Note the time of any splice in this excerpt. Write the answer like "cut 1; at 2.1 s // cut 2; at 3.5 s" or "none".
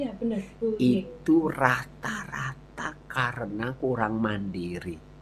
none